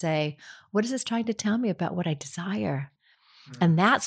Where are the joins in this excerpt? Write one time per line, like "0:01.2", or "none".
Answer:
0:02.9